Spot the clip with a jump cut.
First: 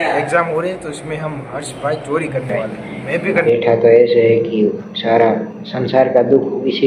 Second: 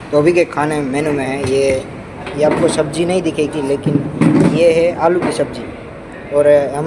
first; 1 cut; at 3.4 s

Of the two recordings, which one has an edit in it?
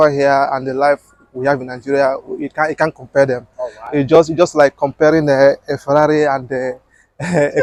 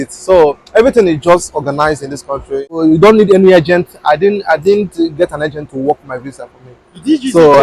second; 1 cut; at 2.8 s

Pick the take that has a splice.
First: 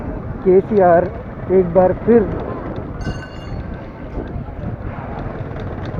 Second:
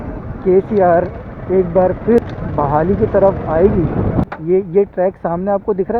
second; 2 cuts; at 2.2 s, 4.3 s

